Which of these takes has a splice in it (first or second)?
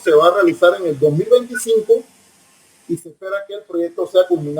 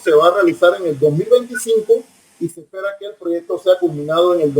second